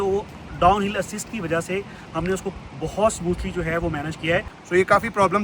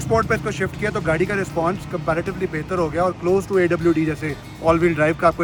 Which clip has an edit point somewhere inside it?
first; 1 cut; at 4.5 s

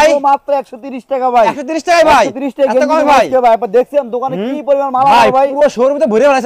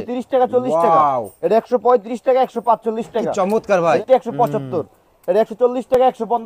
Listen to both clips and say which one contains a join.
second; 1 cut; at 4.0 s

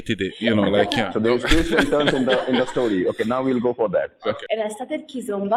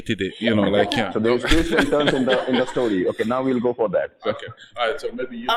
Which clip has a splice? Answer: first; 1 cut; at 4.4 s

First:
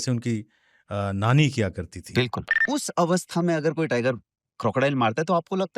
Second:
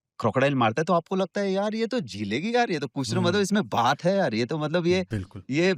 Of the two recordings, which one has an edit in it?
first; 1 cut; at 2.6 s

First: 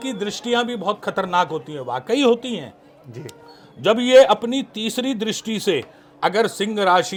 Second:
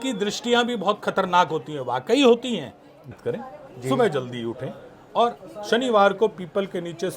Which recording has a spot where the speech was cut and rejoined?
second; 1 cut; at 3.1 s

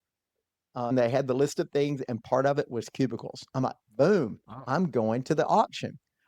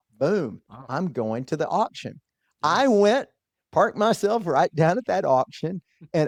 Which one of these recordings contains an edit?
first; 1 cut; at 0.9 s

